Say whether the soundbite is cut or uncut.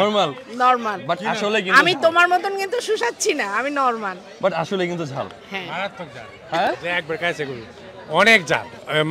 uncut